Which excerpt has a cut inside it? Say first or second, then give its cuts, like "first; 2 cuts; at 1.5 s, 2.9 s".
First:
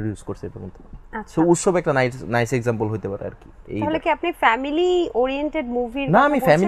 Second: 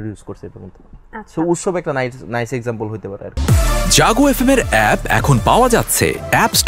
second; 1 cut; at 3.3 s